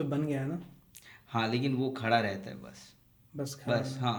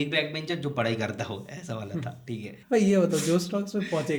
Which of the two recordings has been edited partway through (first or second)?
second